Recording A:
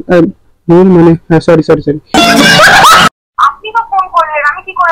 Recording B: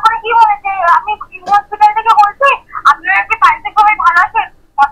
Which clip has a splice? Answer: A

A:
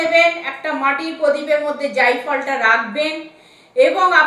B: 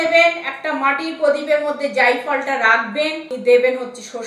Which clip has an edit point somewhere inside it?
B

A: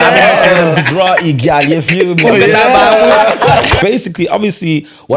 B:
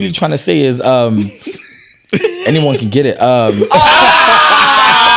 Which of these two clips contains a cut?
A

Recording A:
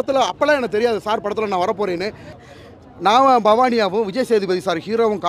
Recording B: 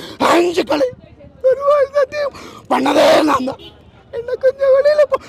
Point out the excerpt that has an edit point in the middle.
A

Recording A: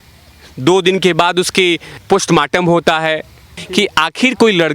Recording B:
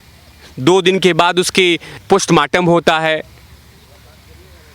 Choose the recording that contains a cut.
A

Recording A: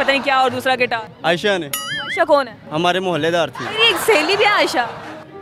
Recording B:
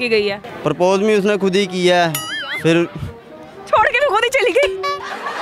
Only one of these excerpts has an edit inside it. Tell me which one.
A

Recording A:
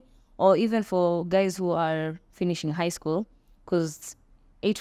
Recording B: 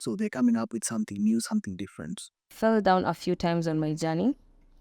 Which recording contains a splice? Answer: B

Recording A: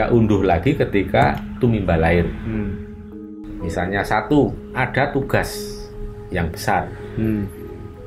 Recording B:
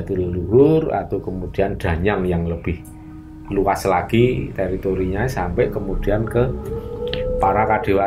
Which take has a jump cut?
A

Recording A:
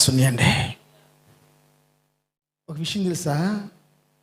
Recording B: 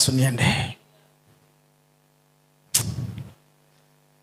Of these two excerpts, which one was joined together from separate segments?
A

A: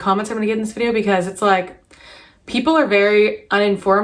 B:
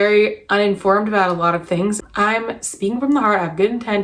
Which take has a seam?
B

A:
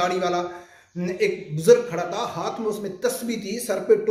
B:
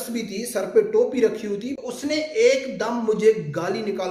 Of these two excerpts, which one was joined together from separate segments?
B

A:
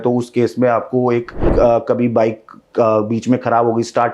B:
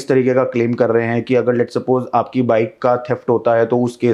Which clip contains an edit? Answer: A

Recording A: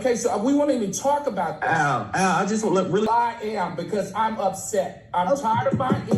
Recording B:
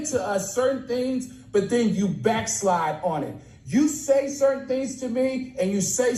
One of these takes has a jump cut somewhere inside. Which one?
A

